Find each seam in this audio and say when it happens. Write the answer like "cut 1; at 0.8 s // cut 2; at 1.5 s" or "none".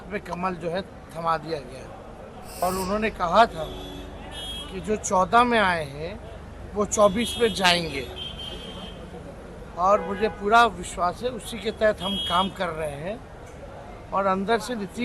cut 1; at 2.6 s